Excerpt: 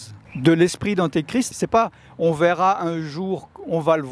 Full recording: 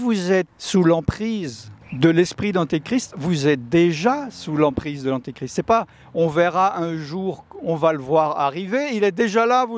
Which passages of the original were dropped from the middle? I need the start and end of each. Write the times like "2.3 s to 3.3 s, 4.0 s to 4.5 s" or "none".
3.1 s to 5.5 s

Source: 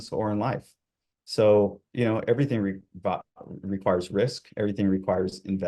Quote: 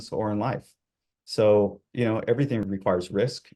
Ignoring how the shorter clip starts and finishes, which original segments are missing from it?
2.7 s to 3.7 s

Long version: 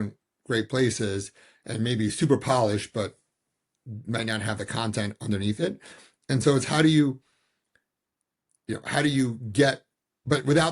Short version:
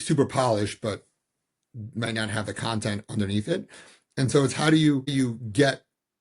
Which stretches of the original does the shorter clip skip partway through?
7.2 s to 9.1 s

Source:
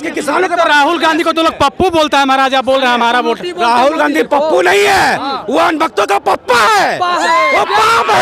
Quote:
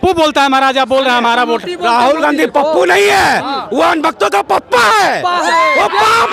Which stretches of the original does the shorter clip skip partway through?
none

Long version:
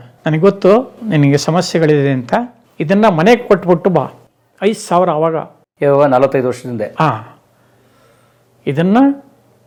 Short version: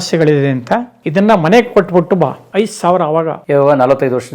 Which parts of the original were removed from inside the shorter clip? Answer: 2.6 s to 2.7 s, 4.2 s to 4.5 s, 5.4 s to 5.7 s

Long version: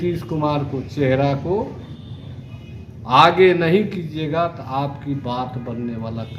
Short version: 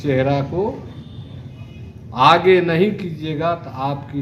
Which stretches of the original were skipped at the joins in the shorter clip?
none

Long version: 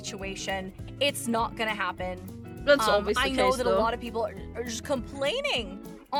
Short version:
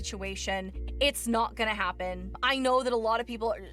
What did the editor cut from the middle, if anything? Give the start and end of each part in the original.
2.5 s to 3.2 s

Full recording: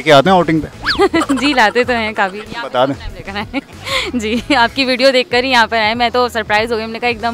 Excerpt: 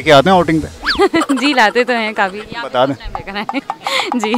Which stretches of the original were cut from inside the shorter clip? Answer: none

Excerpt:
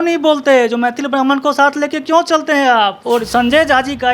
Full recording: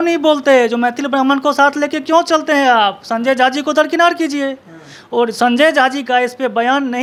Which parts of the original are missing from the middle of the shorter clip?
3.0 s to 5.0 s

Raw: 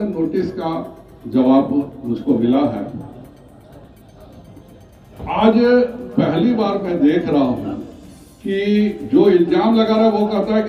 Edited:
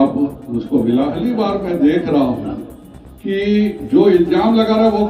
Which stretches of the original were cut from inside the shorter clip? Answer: 2.7 s to 6.4 s

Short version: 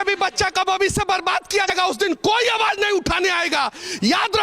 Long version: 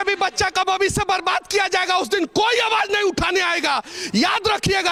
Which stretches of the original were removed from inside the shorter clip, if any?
1.7 s to 1.8 s

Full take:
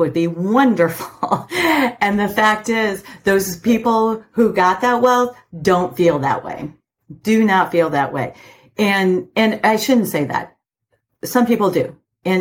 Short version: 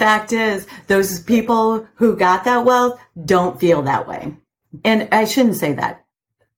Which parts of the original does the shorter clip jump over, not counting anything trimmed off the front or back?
7.1 s to 9.3 s

